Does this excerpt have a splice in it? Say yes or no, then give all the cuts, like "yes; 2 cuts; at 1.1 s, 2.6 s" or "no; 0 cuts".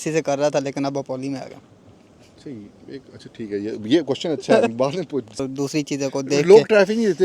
yes; 1 cut; at 5.4 s